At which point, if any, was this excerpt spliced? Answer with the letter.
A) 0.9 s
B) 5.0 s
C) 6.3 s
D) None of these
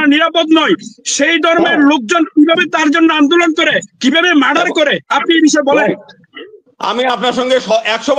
D